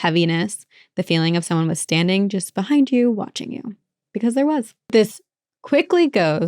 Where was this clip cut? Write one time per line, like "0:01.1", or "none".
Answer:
0:04.9